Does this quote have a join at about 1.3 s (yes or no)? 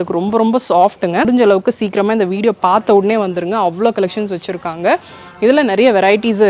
yes